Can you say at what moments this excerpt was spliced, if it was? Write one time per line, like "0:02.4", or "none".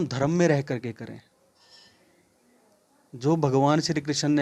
none